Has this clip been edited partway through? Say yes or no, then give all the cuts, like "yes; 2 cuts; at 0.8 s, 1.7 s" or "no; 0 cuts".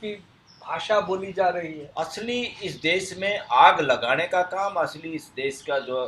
yes; 1 cut; at 1.8 s